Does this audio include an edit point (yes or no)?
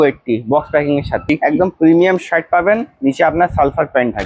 yes